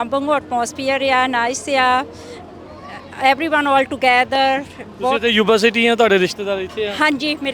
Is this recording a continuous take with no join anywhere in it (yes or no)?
yes